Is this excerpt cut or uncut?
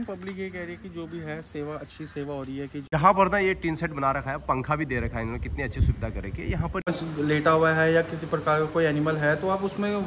cut